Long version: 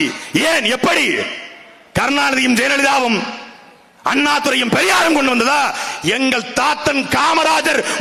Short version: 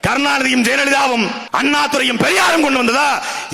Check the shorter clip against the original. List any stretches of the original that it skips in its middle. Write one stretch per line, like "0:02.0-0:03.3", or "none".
0:03.3-0:03.9

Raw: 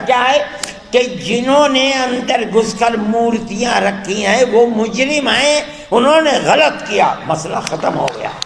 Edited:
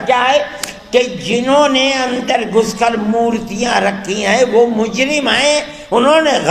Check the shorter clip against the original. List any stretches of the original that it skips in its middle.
none

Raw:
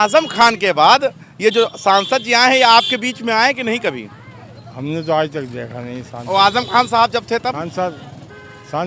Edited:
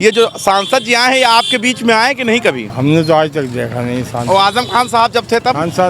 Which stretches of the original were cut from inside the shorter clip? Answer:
0:04.1-0:04.7

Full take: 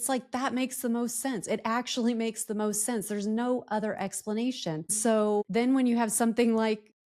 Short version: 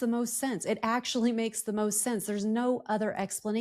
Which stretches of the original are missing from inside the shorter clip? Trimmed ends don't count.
none

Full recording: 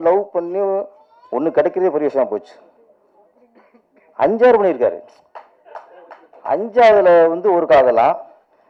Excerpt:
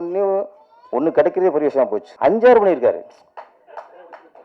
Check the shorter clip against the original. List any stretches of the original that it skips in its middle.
0:02.4-0:04.0

